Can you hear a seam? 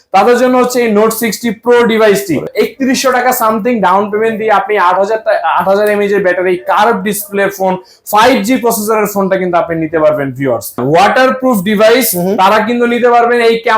yes; 2 cuts; at 2.5 s, 10.8 s

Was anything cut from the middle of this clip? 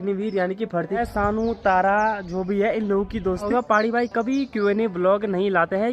yes; 2 cuts; at 1.0 s, 3.5 s

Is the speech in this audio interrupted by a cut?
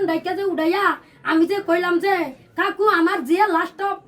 no; 0 cuts

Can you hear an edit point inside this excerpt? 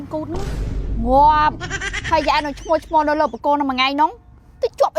no; 0 cuts

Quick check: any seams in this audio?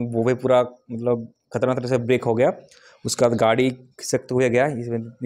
no; 0 cuts

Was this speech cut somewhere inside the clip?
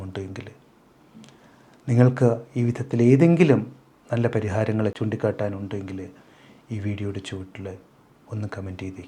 yes; 1 cut; at 5.0 s

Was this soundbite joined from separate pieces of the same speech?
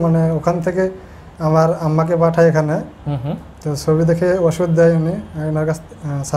no; 0 cuts

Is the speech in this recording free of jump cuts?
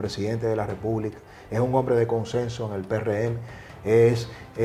yes; 0 cuts

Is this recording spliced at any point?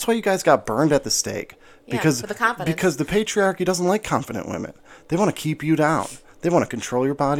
no; 0 cuts

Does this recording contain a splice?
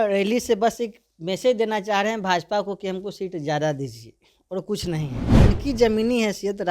yes; 1 cut; at 5.2 s

